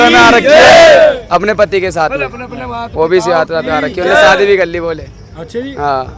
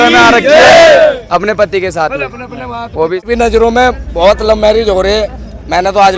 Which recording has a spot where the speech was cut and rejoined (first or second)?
second